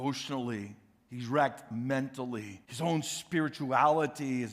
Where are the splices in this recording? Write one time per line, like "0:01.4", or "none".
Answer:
0:02.6